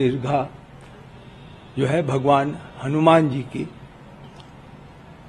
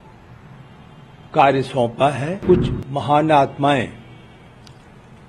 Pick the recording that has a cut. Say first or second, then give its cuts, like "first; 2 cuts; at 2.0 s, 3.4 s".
second; 1 cut; at 2.4 s